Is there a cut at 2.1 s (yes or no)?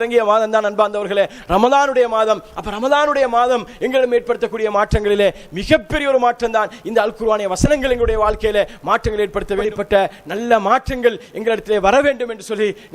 no